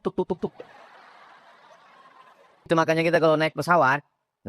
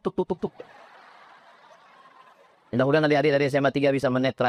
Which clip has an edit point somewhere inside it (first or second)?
first